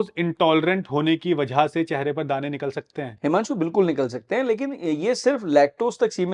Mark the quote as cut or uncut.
uncut